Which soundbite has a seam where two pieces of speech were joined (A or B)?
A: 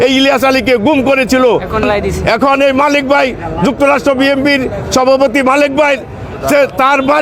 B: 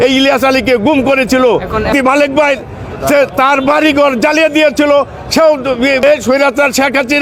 B